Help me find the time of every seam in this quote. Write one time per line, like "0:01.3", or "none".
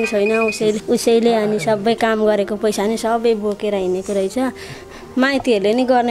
0:04.8